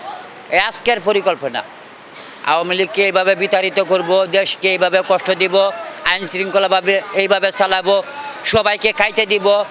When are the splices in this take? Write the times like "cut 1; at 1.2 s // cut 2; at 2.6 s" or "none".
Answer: none